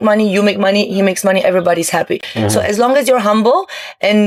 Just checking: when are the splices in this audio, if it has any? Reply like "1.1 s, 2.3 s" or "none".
none